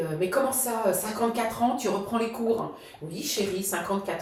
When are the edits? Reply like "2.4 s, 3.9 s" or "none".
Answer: none